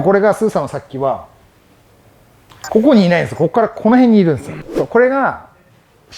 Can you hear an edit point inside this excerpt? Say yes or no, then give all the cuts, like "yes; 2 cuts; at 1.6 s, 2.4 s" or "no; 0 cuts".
yes; 1 cut; at 4.6 s